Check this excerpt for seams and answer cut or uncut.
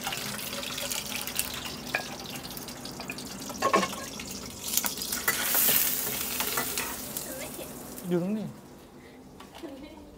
uncut